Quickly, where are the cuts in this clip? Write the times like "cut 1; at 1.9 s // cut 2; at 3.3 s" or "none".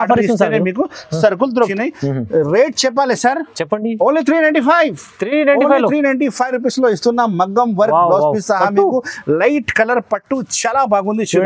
cut 1; at 1.7 s